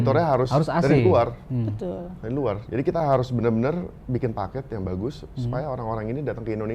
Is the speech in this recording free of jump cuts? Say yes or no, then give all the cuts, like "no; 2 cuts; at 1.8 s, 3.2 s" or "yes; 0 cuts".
yes; 0 cuts